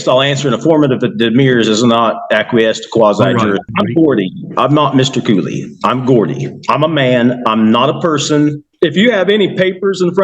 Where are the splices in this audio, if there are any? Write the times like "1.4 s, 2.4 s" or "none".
3.7 s, 8.6 s